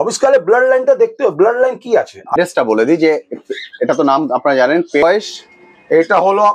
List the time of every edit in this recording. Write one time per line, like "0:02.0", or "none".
0:02.3
0:05.0